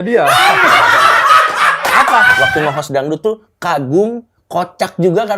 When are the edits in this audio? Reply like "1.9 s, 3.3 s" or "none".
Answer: 2.3 s